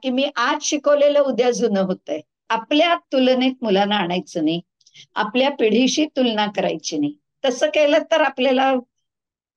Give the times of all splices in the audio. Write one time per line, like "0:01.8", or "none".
0:02.4

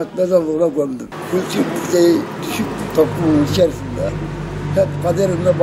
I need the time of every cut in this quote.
0:01.1

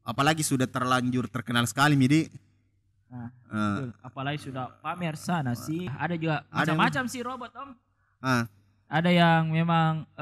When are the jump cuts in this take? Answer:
0:05.9

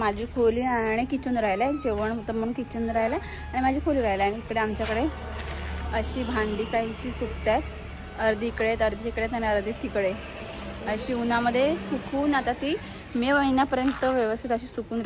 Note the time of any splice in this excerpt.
none

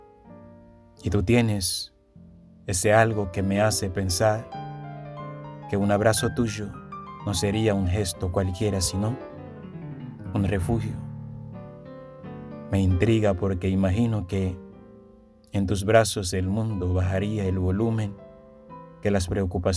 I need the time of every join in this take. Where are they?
0:01.0
0:10.9
0:12.3

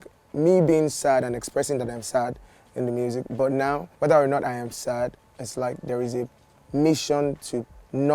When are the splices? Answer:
none

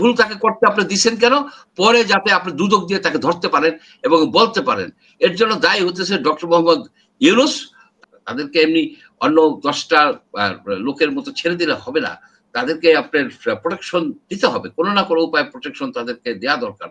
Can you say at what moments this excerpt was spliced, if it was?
0:07.9

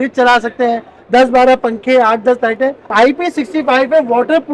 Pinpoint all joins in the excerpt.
0:02.8

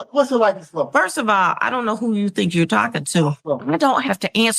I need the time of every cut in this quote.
0:03.4

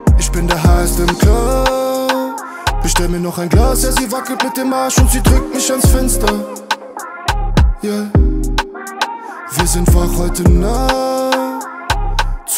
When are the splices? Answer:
none

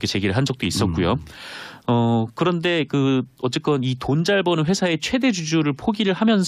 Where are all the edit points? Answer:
0:04.5

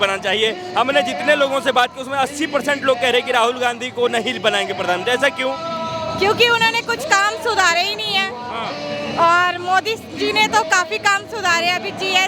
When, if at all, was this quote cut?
none

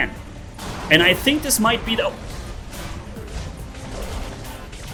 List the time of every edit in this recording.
none

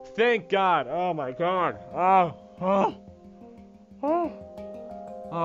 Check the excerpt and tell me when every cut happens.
none

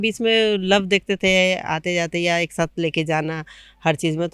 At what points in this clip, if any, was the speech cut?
none

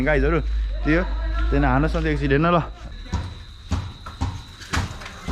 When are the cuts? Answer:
0:02.8

